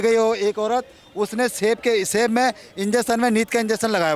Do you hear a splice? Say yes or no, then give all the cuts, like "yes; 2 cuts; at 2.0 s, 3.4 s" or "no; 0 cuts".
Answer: no; 0 cuts